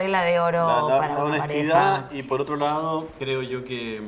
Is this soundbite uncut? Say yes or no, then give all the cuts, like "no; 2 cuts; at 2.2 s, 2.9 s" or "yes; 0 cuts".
no; 1 cut; at 3.1 s